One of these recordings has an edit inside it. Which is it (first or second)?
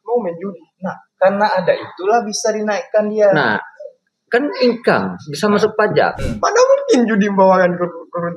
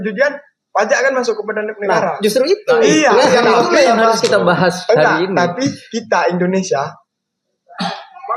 first